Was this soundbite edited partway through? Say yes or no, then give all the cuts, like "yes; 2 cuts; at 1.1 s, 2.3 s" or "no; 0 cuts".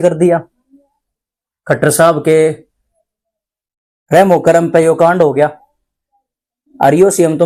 no; 0 cuts